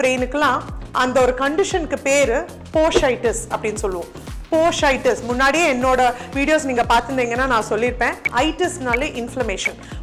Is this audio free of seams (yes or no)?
yes